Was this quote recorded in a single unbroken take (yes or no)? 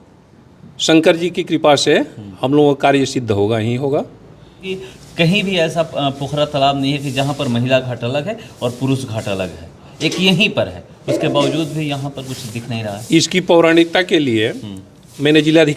no